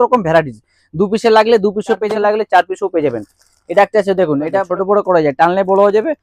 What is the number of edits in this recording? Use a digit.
2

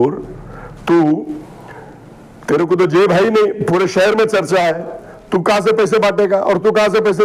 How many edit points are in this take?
0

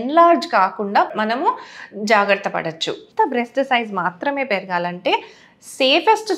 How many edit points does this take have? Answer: 1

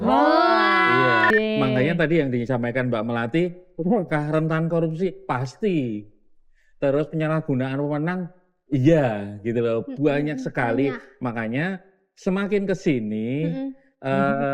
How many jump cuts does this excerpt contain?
1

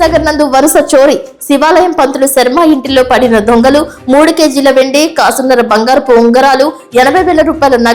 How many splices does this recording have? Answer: 0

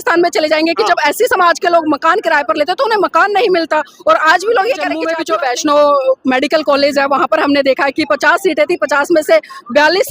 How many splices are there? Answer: 1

